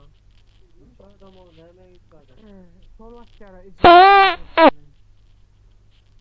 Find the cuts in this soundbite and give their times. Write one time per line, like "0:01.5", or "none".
0:03.7
0:04.9